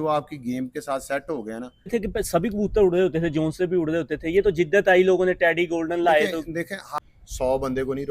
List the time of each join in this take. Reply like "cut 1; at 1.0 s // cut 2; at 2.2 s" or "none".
cut 1; at 1.9 s // cut 2; at 6.8 s